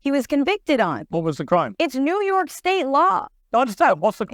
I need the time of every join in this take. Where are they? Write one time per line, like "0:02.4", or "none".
0:01.0
0:02.9

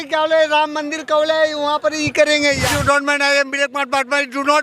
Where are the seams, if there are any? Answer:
0:02.7

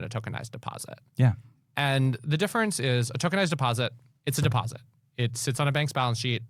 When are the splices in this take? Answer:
none

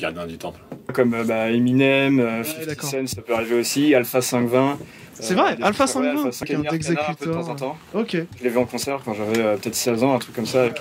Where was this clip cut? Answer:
0:00.9
0:06.4

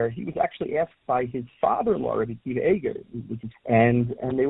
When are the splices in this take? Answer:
0:03.5

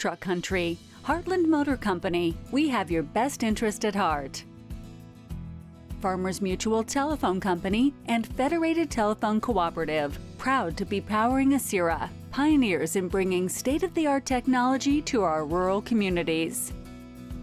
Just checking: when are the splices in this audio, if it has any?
0:16.5

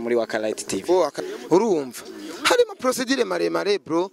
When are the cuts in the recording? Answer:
0:01.2

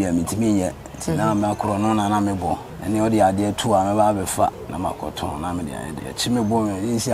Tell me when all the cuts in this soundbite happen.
0:02.7
0:04.6
0:06.0

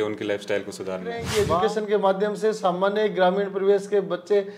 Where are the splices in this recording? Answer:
0:01.4

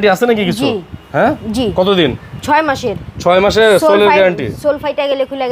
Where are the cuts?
none

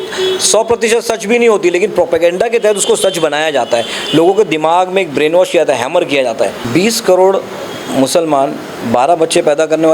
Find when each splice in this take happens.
0:06.6

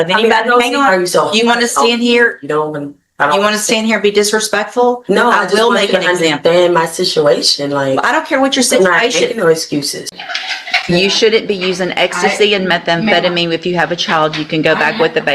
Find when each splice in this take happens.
0:10.1

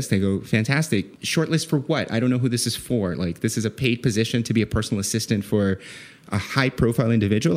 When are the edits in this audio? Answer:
0:01.2

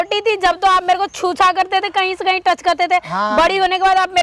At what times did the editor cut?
none

